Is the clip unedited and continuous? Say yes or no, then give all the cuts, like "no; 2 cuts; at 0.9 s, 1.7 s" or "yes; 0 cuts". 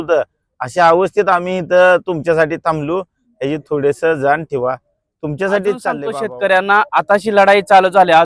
no; 1 cut; at 6.1 s